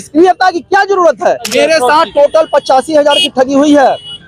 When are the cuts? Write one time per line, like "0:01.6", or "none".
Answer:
0:01.5